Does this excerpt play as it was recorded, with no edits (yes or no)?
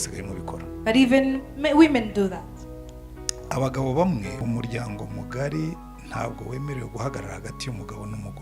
no